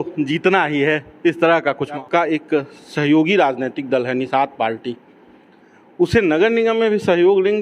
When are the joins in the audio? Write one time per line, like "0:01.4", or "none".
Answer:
0:02.0